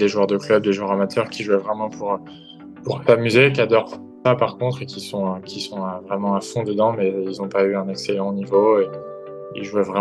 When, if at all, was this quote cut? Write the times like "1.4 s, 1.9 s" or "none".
none